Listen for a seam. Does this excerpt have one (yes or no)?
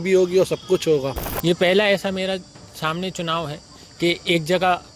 yes